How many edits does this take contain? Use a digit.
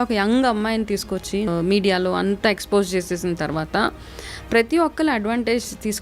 1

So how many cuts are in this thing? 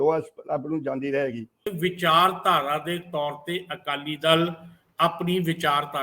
1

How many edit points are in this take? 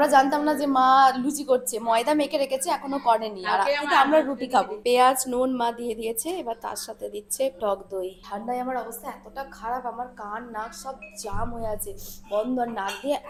0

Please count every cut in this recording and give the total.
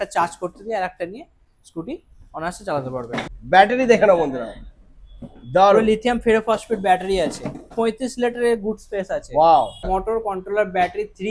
3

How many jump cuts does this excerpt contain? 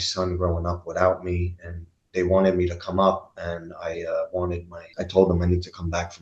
1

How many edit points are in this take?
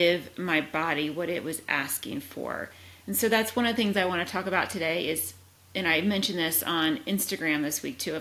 0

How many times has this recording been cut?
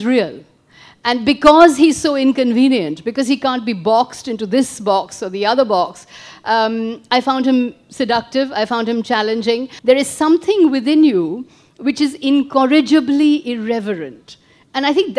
1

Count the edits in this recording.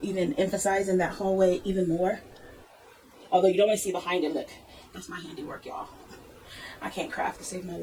0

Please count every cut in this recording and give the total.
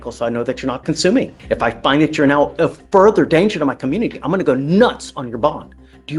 1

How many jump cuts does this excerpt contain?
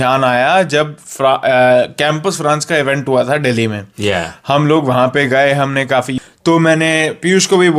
1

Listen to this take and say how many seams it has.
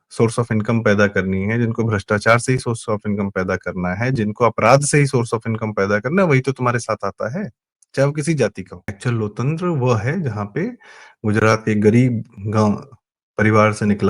1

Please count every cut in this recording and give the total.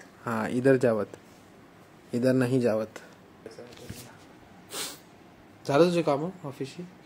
1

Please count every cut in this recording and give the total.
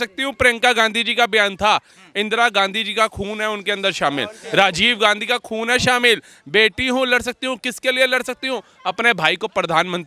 0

